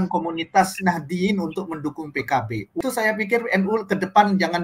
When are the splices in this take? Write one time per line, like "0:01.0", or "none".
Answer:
0:02.8